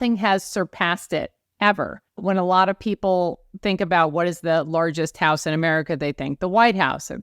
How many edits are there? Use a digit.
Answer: 2